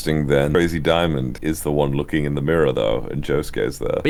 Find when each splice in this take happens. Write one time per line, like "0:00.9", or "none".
none